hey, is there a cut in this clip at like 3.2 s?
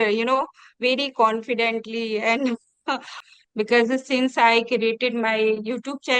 yes; 1 cut; at 3.2 s

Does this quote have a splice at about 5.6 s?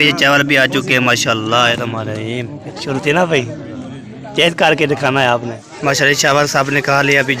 yes; 2 cuts; at 2.6 s, 5.6 s

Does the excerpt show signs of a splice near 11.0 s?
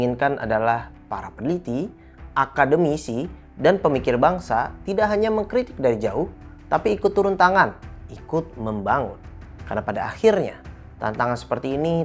no; 0 cuts

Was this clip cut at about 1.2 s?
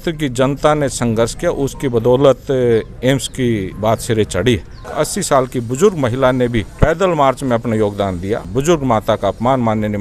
no; 4 cuts; at 3.7 s, 4.9 s, 6.7 s, 8.5 s

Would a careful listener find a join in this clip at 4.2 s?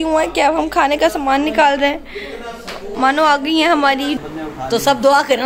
yes; 1 cut; at 4.2 s

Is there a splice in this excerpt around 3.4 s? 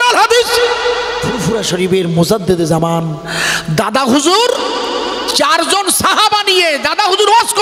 no; 1 cut; at 1.3 s

